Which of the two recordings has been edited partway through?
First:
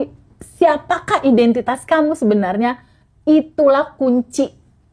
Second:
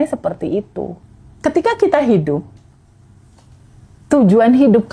second; 1 cut; at 0.9 s

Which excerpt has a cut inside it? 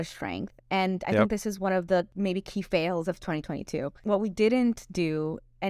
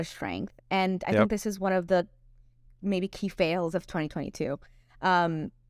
first; 2 cuts; at 2.1 s, 3.9 s

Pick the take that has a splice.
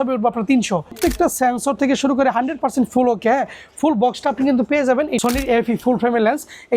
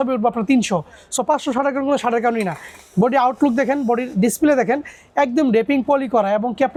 first; 2 cuts; at 1.0 s, 5.1 s

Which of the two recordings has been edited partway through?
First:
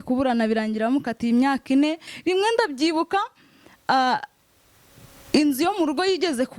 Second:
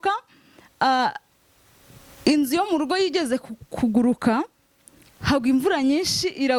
first; 1 cut; at 2.1 s

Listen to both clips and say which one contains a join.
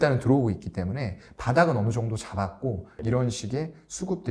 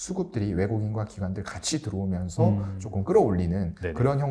first; 1 cut; at 2.9 s

